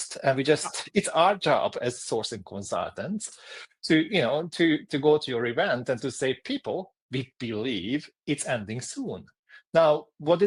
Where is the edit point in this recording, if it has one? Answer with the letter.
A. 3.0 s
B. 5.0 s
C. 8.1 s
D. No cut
D